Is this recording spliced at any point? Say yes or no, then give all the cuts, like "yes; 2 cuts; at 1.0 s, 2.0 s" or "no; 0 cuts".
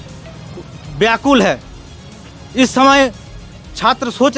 no; 0 cuts